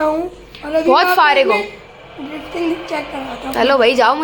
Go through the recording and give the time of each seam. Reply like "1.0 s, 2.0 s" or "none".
none